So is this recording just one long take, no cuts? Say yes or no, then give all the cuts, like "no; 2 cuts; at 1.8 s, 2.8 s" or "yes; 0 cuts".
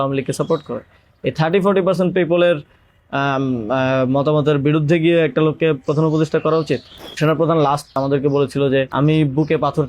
no; 3 cuts; at 7.2 s, 8.0 s, 8.9 s